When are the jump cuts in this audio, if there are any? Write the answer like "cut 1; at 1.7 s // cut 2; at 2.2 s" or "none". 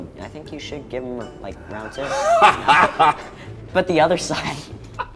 none